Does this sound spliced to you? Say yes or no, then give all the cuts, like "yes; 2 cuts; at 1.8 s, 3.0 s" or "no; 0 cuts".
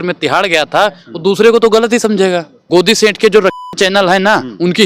yes; 1 cut; at 2.5 s